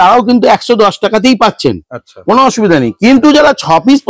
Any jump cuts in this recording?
no; 0 cuts

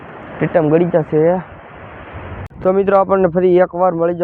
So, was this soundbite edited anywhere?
yes; 1 cut; at 2.5 s

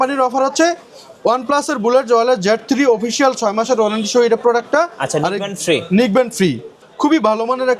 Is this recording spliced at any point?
yes; 1 cut; at 6.7 s

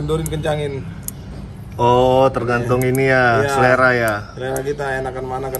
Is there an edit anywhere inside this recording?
no; 0 cuts

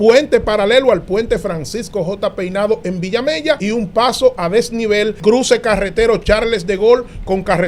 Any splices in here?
yes; 2 cuts; at 3.6 s, 5.2 s

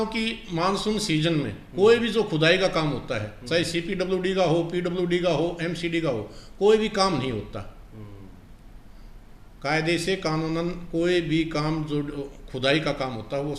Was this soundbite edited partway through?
no; 0 cuts

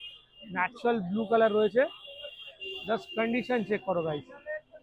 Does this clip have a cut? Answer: no; 0 cuts

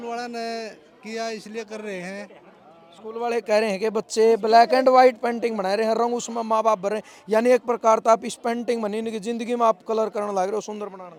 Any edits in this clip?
no; 0 cuts

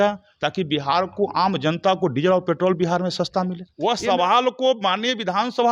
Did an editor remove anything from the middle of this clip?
yes; 1 cut; at 3.6 s

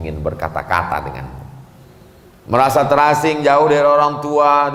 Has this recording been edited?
no; 0 cuts

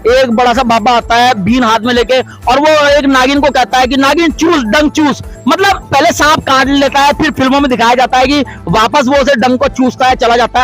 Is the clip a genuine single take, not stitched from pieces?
yes; 0 cuts

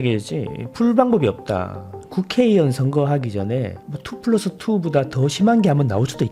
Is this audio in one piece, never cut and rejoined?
no; 1 cut; at 2.0 s

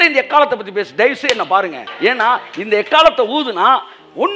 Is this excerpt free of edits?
no; 1 cut; at 1.8 s

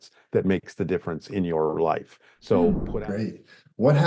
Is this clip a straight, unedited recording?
no; 1 cut; at 2.7 s

